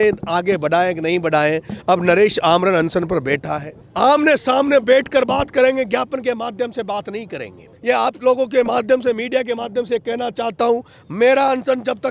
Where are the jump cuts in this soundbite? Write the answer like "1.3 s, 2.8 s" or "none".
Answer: 3.8 s, 7.7 s